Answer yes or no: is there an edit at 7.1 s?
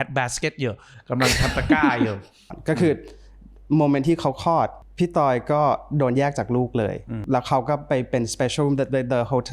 yes